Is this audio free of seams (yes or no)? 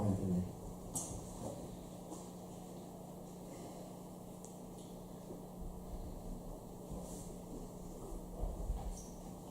no